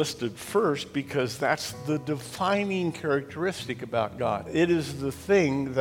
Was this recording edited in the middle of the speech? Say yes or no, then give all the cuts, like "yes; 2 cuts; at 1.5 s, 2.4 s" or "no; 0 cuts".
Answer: yes; 1 cut; at 4.5 s